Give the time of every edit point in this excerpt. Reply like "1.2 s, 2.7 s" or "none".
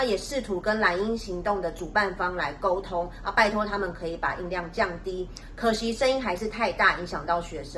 none